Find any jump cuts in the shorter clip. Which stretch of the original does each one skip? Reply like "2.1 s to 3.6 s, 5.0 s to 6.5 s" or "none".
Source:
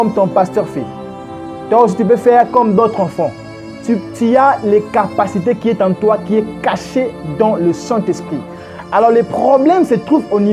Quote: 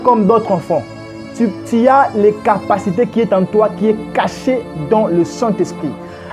none